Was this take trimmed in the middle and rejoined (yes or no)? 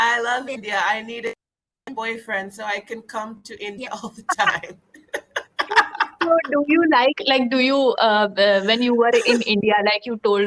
no